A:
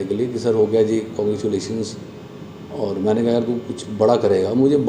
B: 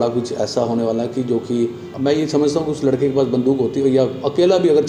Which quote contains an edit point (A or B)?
B